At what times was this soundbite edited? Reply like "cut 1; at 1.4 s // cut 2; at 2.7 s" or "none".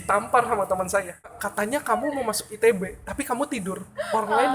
cut 1; at 1.4 s